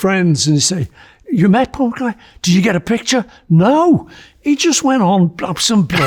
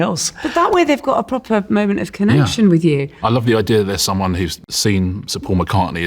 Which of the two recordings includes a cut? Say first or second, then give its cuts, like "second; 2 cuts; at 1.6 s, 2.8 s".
second; 2 cuts; at 3.1 s, 4.6 s